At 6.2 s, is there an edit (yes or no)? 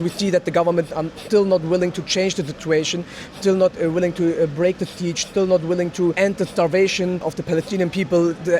yes